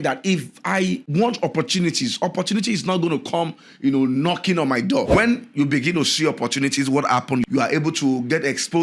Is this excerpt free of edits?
no; 3 cuts; at 1.0 s, 5.1 s, 7.4 s

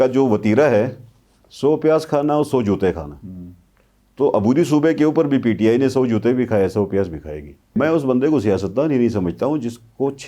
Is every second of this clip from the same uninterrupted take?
no; 1 cut; at 7.6 s

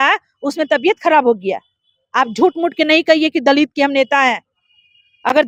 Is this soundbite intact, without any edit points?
yes; 0 cuts

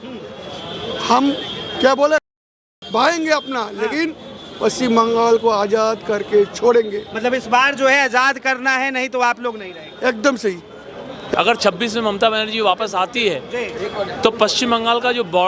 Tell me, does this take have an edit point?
yes; 1 cut; at 11.3 s

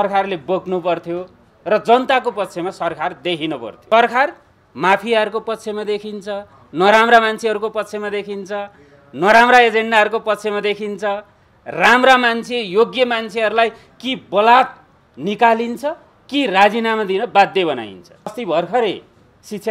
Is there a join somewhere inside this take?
yes; 2 cuts; at 3.7 s, 18.4 s

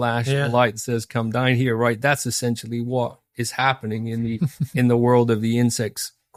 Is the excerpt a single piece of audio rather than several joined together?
yes; 0 cuts

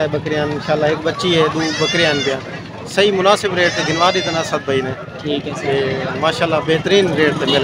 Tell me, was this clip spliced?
no; 0 cuts

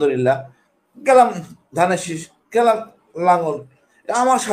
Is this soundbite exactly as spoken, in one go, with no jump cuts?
yes; 0 cuts

